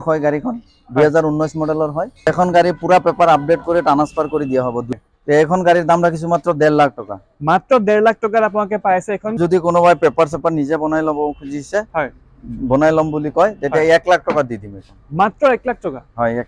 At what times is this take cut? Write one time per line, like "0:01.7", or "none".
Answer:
0:02.3
0:04.9
0:09.4